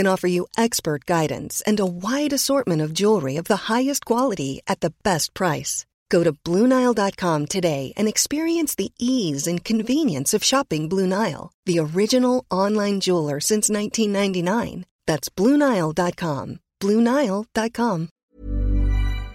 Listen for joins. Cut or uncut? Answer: cut